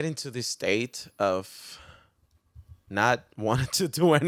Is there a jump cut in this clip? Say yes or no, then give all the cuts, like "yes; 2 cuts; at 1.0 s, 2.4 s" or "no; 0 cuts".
no; 0 cuts